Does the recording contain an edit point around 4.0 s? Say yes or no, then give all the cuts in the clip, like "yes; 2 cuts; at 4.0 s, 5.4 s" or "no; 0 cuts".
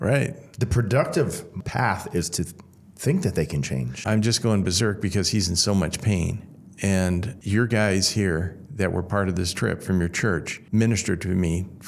yes; 4 cuts; at 1.5 s, 4.0 s, 7.3 s, 10.5 s